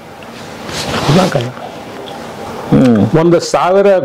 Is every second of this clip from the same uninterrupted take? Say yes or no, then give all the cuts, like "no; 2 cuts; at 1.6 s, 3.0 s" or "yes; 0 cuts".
no; 1 cut; at 2.5 s